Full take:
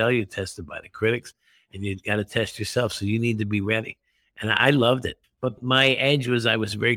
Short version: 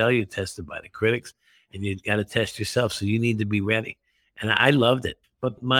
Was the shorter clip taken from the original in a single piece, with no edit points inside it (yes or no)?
yes